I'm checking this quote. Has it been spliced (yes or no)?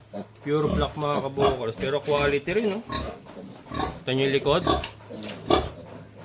no